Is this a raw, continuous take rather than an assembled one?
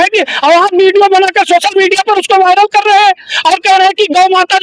yes; 0 cuts

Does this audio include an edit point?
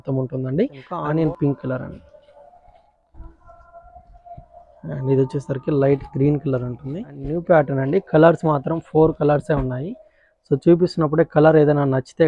yes; 2 cuts; at 0.9 s, 7.2 s

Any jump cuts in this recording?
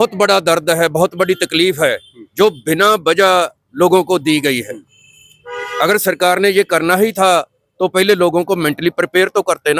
no; 0 cuts

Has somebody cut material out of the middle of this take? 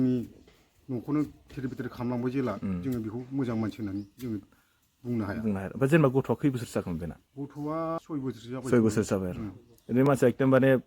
yes; 1 cut; at 8.0 s

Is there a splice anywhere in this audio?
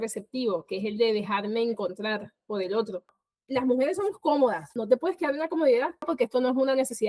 yes; 3 cuts; at 3.1 s, 4.7 s, 6.1 s

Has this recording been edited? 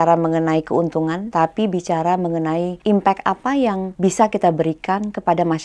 yes; 3 cuts; at 1.2 s, 2.7 s, 3.9 s

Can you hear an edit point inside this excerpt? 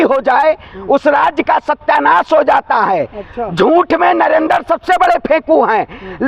no; 0 cuts

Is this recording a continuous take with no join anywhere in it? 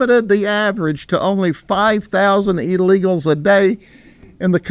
yes; 0 cuts

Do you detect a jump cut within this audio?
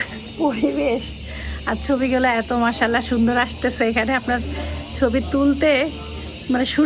no; 0 cuts

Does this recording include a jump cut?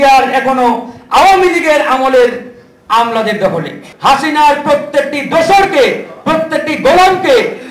yes; 1 cut; at 3.8 s

